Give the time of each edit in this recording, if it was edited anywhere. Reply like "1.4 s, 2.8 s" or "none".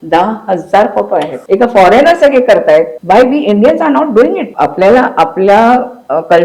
1.4 s, 2.9 s, 4.5 s